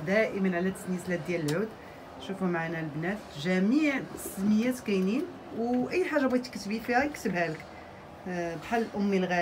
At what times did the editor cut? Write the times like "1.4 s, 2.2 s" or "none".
none